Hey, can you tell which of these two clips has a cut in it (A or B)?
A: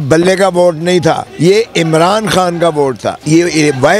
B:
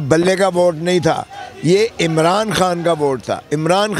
A